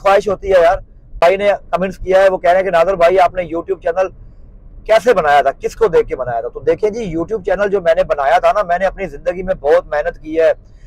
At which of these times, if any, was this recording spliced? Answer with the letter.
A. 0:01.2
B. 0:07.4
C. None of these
A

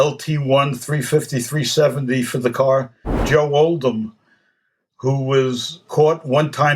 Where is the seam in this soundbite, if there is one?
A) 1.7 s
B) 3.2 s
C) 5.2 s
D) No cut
B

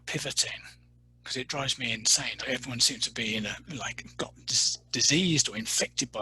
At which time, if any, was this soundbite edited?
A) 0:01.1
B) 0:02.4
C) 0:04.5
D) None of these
B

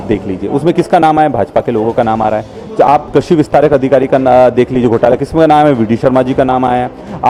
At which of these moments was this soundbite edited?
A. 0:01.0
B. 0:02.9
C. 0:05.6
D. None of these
D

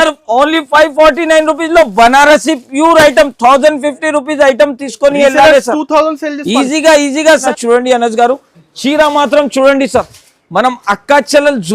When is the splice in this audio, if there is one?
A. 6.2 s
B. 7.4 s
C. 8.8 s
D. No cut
B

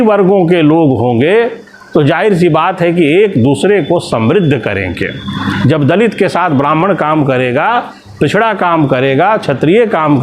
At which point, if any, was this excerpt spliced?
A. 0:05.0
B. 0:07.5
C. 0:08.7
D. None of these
D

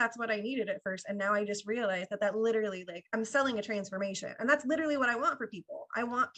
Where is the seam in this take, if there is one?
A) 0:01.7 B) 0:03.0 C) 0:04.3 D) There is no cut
B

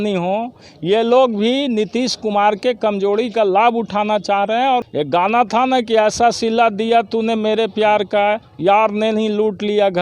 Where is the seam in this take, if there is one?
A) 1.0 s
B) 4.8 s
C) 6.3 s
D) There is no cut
B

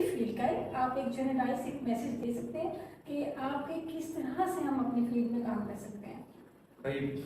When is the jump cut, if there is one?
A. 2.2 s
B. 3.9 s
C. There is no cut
A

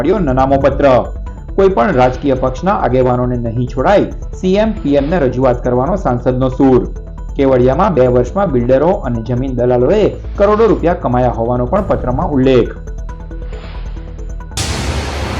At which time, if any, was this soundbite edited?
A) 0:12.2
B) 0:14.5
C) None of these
B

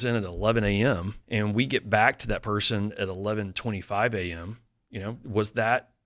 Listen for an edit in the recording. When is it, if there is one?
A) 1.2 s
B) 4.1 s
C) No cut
A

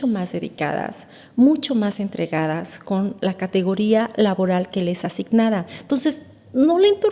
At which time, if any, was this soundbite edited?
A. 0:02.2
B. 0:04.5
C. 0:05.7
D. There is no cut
D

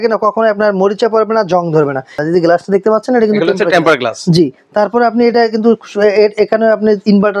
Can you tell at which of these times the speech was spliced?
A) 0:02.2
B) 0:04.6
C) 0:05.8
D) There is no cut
A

